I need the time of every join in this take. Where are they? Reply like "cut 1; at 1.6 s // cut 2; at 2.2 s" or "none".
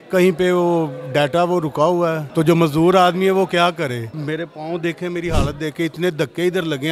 cut 1; at 2.2 s // cut 2; at 4.1 s